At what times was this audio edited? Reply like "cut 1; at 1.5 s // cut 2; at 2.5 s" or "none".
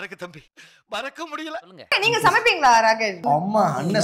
cut 1; at 1.8 s // cut 2; at 3.1 s